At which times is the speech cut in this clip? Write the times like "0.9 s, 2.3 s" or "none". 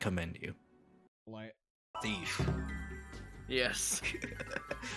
1.3 s

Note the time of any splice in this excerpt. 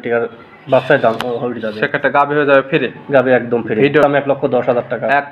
4.0 s

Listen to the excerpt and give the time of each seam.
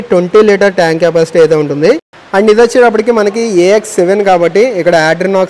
none

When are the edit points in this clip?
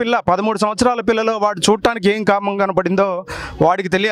none

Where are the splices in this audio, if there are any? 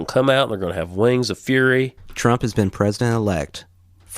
2.0 s

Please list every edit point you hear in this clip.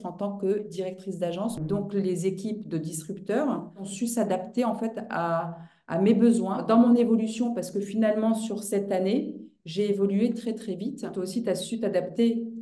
1.6 s, 3.9 s, 6.6 s, 11.1 s

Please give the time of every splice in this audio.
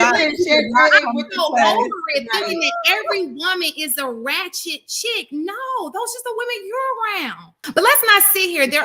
7.5 s

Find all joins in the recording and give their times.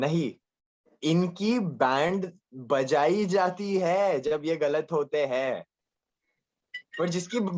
none

